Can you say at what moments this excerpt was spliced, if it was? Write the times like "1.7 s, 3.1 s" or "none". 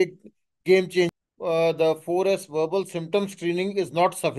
1.1 s